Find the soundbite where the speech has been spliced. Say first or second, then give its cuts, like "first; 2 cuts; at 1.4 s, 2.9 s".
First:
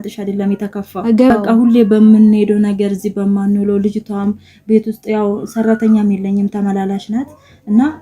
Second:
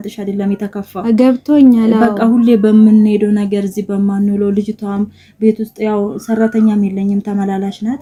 first; 1 cut; at 1.3 s